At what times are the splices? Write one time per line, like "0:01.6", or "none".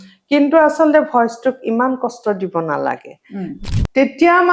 0:03.5